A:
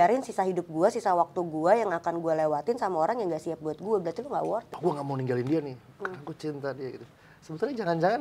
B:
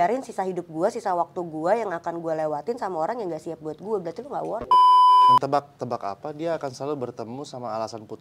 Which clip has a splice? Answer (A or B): A